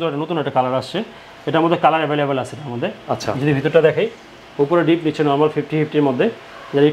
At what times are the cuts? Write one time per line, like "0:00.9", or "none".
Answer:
none